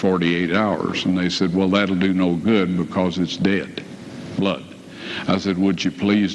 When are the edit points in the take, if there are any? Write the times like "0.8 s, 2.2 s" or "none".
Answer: none